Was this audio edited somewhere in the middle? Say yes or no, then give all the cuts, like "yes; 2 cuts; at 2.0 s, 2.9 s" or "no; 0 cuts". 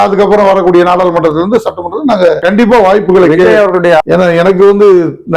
yes; 1 cut; at 4.0 s